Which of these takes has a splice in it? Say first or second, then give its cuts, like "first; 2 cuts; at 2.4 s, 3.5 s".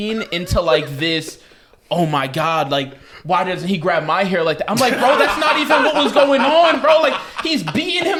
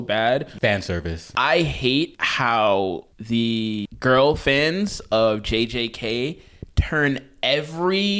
second; 4 cuts; at 0.8 s, 2.2 s, 3.1 s, 3.9 s